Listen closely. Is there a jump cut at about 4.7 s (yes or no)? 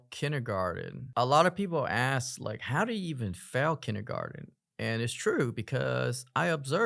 no